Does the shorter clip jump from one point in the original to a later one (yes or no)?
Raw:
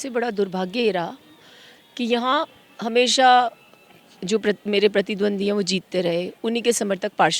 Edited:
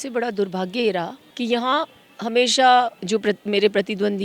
yes